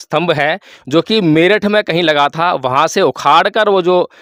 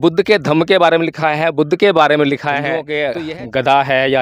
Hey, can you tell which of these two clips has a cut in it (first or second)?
second